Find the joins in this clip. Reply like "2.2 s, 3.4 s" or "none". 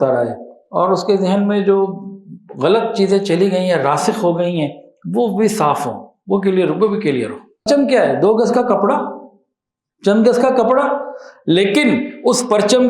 7.7 s